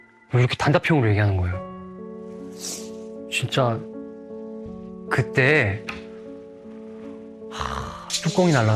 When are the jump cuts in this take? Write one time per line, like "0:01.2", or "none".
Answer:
none